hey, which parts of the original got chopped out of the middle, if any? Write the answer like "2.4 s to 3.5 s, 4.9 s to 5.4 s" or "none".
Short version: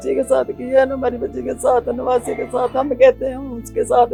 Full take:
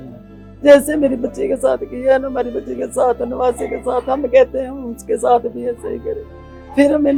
none